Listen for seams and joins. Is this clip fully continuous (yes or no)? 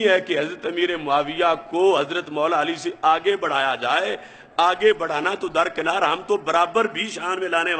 yes